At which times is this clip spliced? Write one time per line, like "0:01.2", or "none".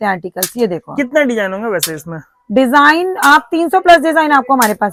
none